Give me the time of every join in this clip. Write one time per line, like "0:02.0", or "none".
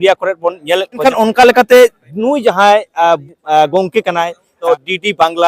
0:01.0
0:04.5